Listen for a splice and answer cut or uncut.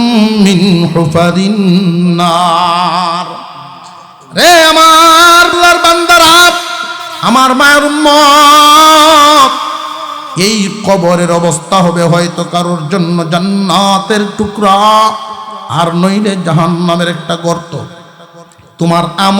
cut